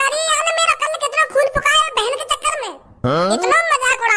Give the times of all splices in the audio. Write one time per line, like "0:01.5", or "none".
none